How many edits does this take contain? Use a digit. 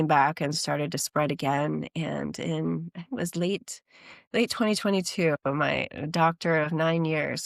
0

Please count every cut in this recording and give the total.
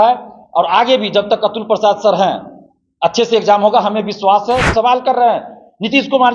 1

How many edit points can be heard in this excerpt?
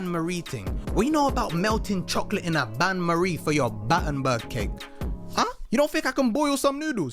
1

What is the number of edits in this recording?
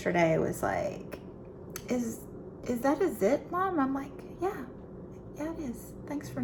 0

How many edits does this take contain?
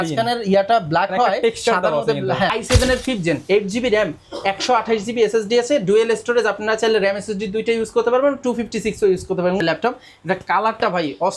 2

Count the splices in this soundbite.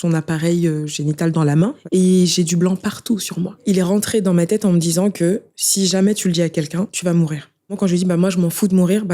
4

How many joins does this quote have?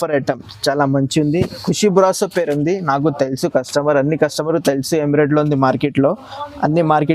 0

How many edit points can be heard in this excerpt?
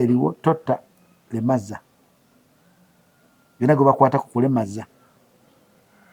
0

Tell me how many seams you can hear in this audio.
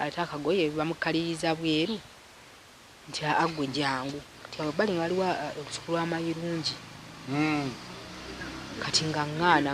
1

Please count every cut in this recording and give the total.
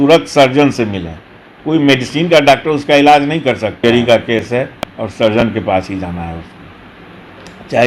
2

